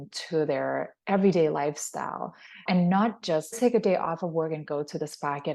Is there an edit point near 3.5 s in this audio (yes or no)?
yes